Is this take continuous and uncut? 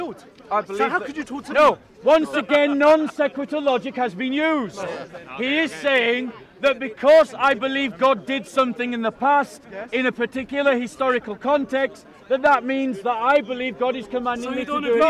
yes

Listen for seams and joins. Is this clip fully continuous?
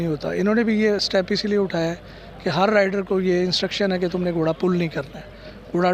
yes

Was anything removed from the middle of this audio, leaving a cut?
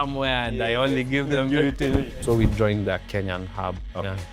yes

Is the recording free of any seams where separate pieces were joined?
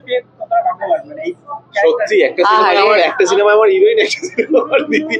yes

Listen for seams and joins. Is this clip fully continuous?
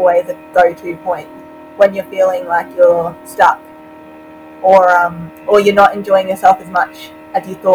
yes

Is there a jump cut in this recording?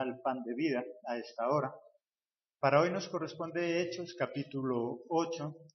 yes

